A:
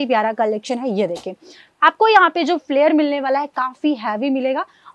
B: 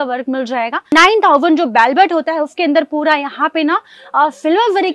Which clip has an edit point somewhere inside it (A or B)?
B